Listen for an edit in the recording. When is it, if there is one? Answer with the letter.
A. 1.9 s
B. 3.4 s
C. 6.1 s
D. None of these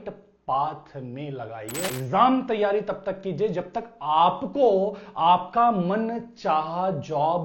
A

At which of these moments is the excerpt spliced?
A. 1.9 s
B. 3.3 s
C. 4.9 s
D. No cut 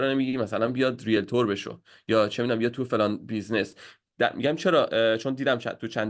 D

